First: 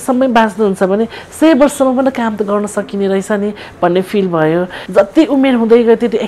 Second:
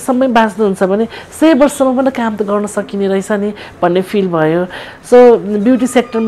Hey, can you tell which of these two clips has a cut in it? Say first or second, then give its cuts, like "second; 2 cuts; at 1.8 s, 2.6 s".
first; 1 cut; at 4.8 s